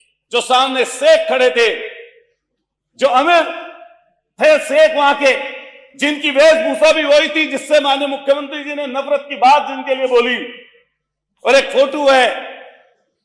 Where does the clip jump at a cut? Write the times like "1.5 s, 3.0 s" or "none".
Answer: none